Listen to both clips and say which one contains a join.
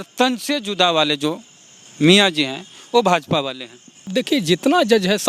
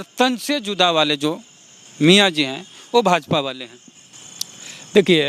first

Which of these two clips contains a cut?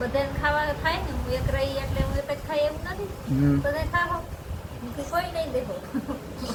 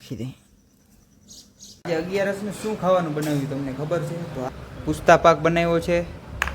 second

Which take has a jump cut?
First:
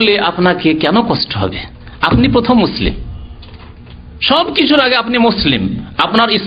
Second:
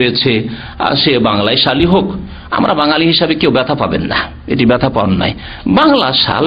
first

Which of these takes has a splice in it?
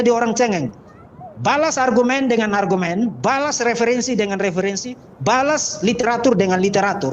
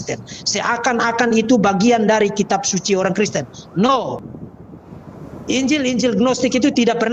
second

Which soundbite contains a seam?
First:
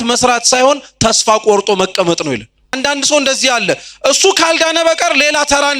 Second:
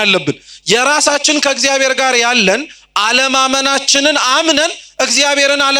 first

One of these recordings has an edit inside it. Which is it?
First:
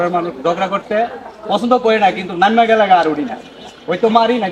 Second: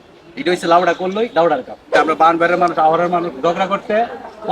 second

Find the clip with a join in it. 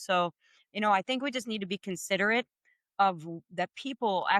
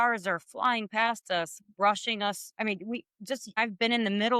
second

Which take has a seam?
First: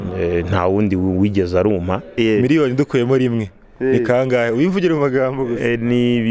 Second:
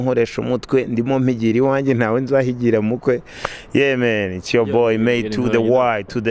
first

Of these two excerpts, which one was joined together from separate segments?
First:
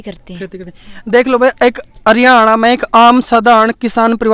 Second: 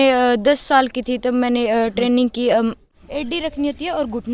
second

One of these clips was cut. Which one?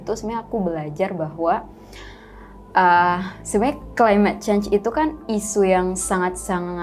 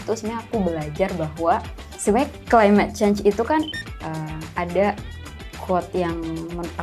second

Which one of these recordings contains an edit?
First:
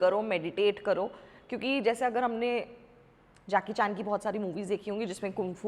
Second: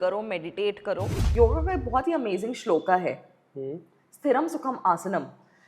second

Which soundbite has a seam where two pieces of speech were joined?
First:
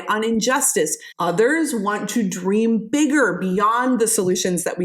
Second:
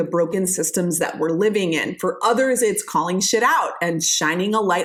first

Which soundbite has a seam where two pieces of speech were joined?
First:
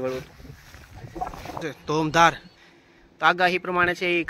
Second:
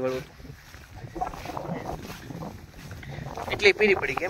first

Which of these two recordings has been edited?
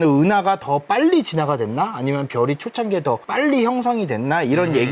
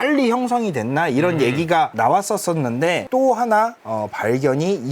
second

